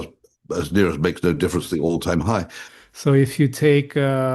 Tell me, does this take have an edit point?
yes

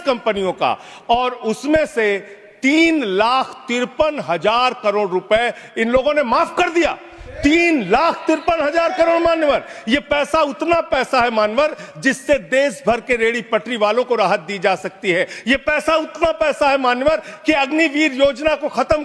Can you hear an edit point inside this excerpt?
no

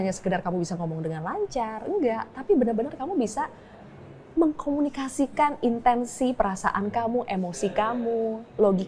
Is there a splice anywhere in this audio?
no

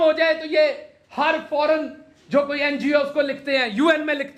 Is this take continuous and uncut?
yes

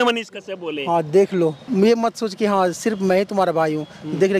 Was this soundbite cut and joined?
yes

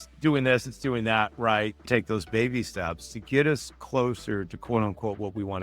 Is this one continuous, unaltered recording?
no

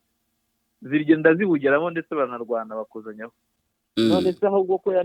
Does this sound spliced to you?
yes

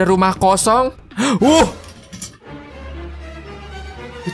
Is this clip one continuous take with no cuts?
no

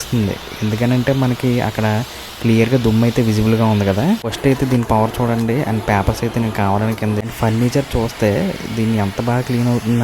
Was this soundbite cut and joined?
yes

